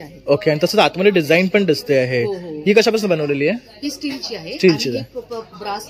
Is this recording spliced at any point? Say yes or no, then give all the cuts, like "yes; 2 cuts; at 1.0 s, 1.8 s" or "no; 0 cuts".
no; 0 cuts